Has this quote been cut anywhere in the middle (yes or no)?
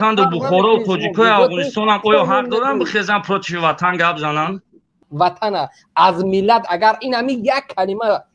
yes